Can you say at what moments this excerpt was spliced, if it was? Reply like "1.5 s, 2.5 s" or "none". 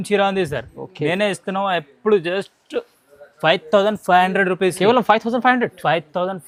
none